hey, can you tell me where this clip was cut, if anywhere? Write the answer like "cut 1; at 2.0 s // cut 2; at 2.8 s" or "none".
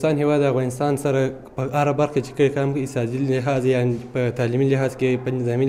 none